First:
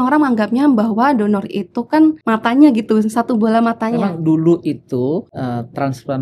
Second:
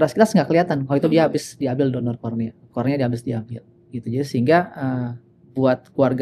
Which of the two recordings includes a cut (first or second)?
first